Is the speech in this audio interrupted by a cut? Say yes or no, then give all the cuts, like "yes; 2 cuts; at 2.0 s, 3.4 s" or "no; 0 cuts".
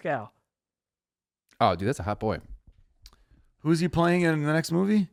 no; 0 cuts